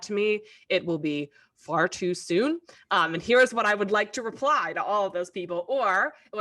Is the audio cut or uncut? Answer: uncut